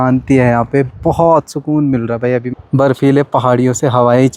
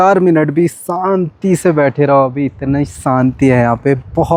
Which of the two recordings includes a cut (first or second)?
first